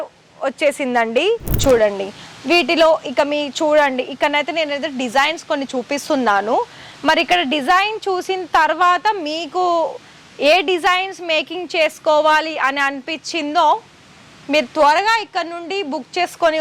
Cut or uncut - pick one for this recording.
cut